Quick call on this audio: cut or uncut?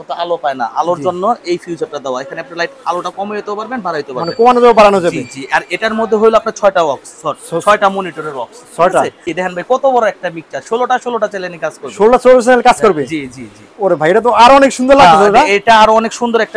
cut